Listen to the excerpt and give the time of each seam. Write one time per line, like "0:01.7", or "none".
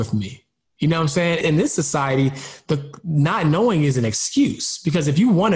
0:01.4